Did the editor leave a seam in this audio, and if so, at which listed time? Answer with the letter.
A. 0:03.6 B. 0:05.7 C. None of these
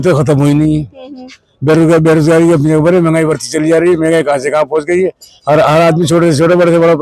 C